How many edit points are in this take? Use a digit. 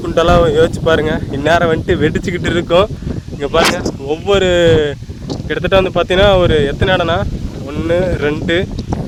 0